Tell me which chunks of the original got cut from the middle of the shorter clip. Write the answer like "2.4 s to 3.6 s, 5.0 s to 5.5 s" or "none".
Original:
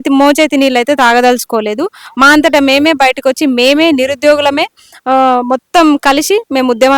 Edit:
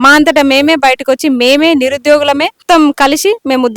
4.8 s to 5.6 s

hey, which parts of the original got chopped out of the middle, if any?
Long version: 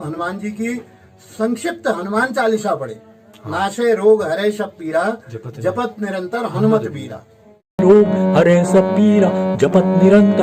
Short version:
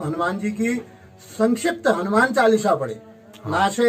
none

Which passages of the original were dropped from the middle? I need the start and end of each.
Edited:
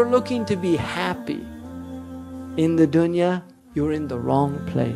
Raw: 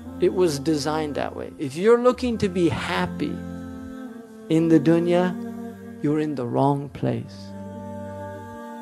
5.5 s to 5.8 s

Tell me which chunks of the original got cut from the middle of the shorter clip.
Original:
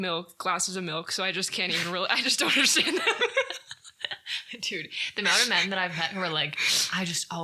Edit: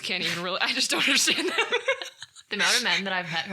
3.8 s to 5.0 s

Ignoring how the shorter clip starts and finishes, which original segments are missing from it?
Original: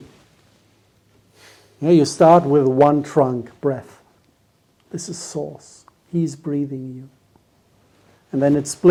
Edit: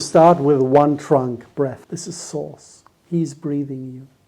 3.9 s to 4.8 s

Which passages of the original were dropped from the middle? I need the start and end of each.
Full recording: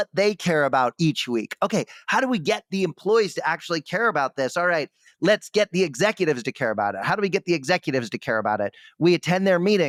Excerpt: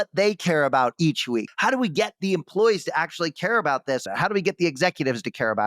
1.5 s to 2.0 s, 4.5 s to 6.9 s

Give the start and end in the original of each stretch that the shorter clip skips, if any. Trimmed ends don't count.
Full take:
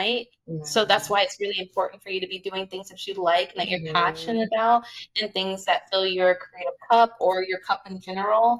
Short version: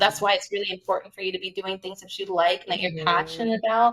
none

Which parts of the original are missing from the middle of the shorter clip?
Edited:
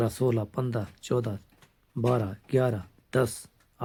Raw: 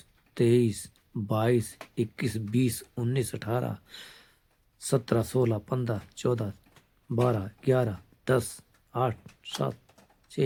none

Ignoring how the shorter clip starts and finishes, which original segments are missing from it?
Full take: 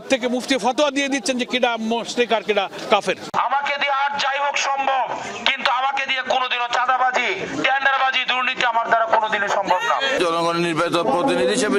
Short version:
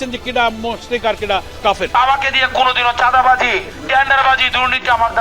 3.2 s to 5.7 s

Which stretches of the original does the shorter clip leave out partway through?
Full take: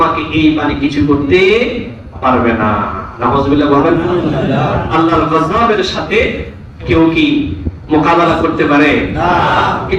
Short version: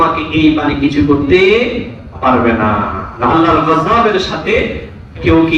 3.3 s to 5.0 s

